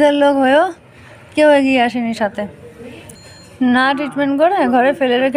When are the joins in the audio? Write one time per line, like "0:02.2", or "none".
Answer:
0:03.1